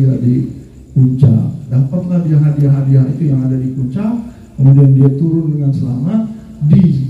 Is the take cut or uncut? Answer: uncut